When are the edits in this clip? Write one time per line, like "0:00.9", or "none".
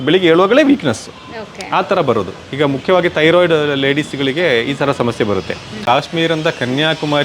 0:05.8